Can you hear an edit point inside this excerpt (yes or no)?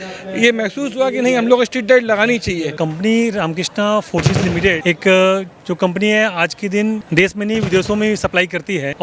yes